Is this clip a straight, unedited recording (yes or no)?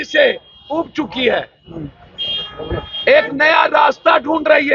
yes